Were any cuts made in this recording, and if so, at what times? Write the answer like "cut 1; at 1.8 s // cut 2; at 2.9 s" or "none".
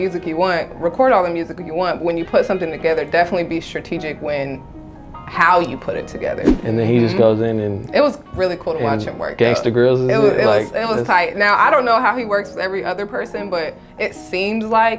cut 1; at 6.5 s